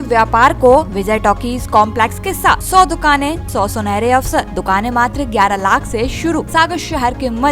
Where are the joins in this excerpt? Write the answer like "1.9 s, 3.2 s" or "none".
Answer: 0.9 s, 2.6 s, 3.4 s, 4.5 s, 6.5 s

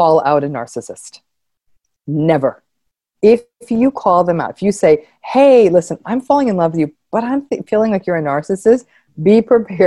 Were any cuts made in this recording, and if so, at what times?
3.1 s

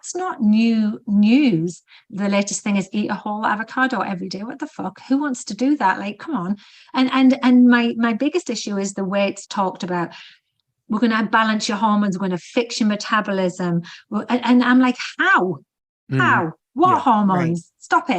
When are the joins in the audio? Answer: 1.9 s, 9.4 s

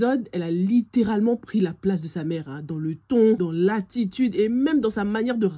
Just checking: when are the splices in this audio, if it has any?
3.4 s

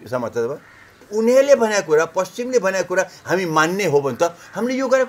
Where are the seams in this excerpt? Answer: 1.1 s

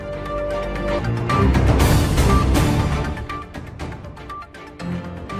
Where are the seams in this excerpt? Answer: none

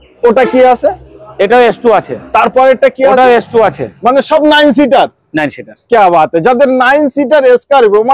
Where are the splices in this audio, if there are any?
none

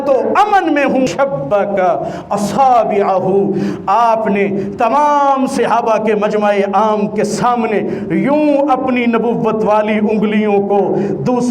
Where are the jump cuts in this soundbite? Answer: 1.1 s

